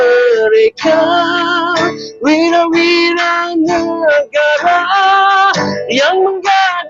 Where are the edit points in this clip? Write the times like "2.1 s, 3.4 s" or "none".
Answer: none

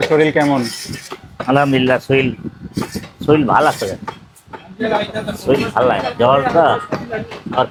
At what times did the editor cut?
none

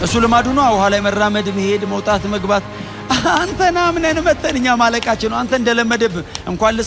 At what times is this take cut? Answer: none

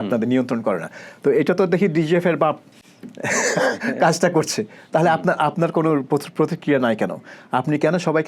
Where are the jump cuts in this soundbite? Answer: none

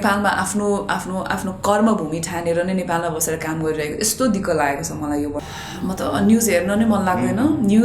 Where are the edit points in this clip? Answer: 5.4 s

